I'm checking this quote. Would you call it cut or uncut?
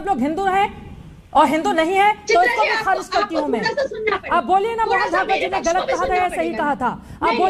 uncut